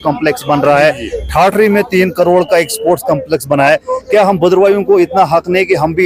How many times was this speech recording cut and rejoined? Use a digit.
0